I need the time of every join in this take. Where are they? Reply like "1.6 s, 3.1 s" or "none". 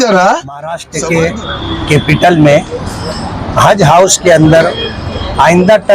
0.9 s